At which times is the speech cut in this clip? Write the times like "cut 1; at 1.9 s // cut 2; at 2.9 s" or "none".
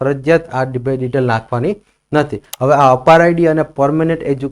cut 1; at 2.4 s